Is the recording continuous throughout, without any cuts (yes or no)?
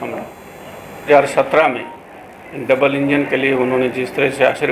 no